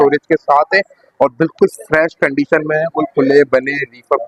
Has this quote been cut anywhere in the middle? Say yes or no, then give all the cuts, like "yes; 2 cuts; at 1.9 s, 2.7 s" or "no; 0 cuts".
no; 0 cuts